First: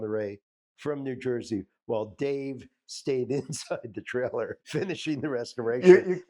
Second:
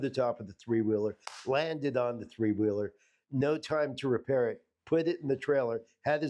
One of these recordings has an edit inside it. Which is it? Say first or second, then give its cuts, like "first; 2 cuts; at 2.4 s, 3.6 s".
first; 1 cut; at 4.7 s